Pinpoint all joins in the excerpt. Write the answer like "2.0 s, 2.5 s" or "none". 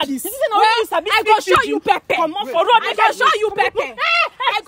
none